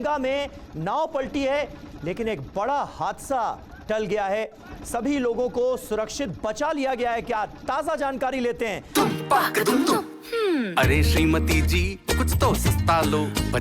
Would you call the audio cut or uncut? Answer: cut